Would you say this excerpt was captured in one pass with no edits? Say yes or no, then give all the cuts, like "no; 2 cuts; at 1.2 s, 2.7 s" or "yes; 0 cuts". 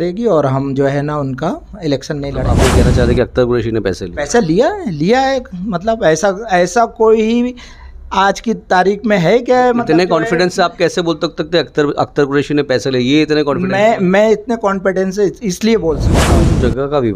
no; 2 cuts; at 2.5 s, 16.2 s